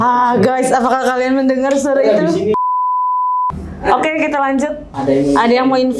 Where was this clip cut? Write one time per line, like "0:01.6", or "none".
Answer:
0:04.9